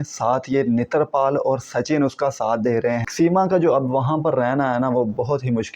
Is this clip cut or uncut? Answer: cut